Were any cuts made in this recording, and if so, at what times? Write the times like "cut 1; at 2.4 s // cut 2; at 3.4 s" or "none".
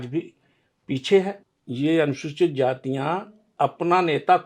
cut 1; at 1.4 s